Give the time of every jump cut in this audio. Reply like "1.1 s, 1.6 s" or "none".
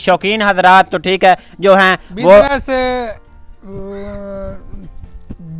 none

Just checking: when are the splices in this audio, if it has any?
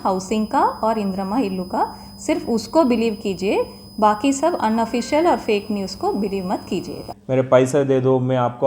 7.1 s

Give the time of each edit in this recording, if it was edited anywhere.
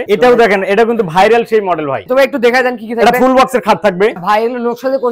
2.0 s, 4.2 s

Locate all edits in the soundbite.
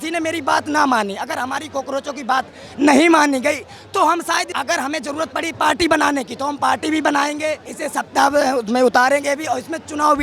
4.5 s, 7.7 s

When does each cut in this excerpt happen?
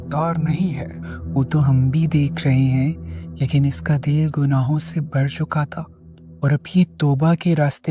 none

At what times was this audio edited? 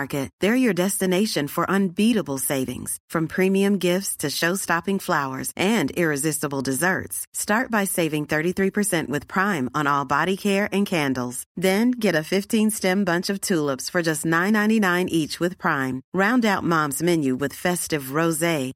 none

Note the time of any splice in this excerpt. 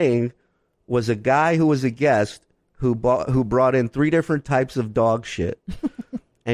none

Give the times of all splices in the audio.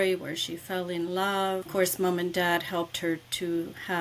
1.7 s

